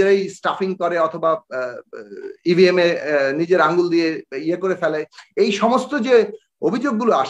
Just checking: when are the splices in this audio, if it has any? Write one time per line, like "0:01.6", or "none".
none